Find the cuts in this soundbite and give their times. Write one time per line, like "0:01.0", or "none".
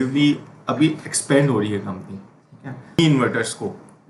0:03.0

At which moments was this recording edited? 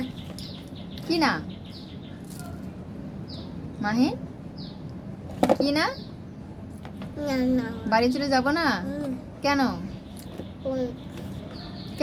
none

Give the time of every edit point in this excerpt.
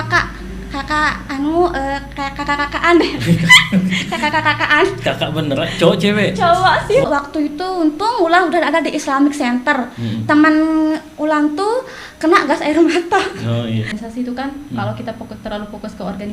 0:07.1
0:14.0

